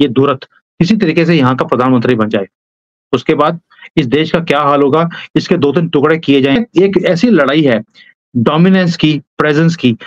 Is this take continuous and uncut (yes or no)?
no